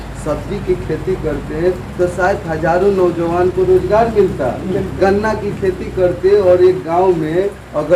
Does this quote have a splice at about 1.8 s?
no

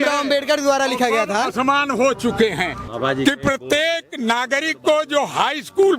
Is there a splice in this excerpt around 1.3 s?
no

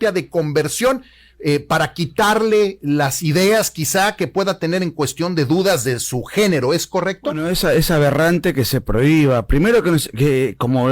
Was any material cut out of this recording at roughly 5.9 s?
no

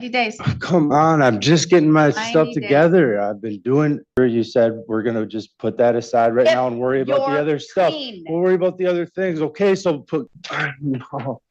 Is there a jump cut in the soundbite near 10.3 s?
yes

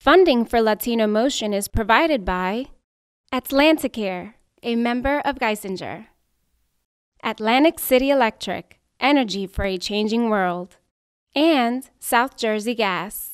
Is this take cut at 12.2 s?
no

